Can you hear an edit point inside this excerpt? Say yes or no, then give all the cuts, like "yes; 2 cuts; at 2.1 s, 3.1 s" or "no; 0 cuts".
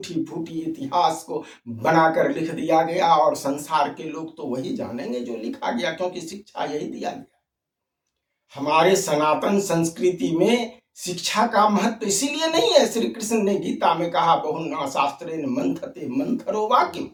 no; 0 cuts